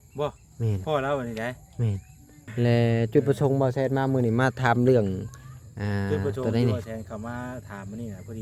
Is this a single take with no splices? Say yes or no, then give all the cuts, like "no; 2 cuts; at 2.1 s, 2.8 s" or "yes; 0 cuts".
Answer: no; 1 cut; at 2.3 s